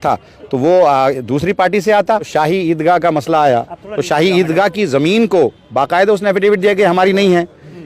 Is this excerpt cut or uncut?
cut